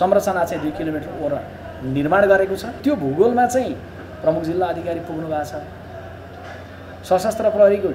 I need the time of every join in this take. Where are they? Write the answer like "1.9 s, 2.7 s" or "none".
2.7 s